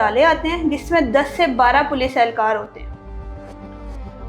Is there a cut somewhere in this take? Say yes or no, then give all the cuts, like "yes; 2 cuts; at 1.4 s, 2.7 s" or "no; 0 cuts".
no; 0 cuts